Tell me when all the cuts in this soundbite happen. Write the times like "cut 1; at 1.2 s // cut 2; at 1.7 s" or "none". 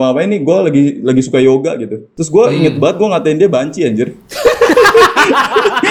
none